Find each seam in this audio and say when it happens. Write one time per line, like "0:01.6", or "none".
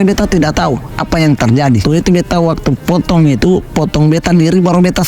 0:01.8